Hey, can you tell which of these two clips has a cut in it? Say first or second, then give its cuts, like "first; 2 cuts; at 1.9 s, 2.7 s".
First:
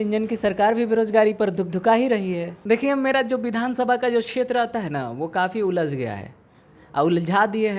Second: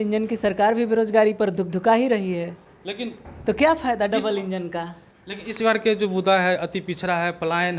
first; 1 cut; at 2.5 s